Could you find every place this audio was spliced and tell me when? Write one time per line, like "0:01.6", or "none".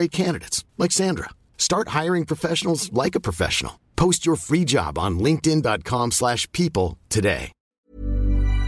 0:07.7